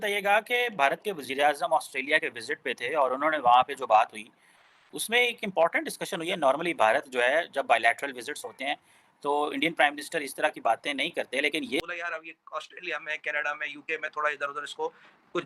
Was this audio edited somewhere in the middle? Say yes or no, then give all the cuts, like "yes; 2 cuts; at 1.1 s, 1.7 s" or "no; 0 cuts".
yes; 1 cut; at 11.8 s